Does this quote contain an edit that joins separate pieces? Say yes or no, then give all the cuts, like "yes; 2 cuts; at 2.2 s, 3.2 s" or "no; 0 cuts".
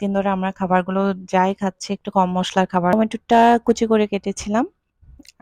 yes; 1 cut; at 2.9 s